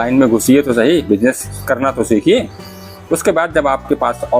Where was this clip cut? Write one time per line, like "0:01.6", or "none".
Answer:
0:01.5